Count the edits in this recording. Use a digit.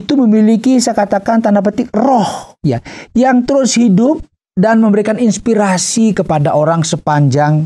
0